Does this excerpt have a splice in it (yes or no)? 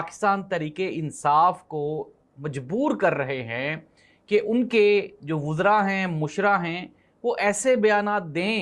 no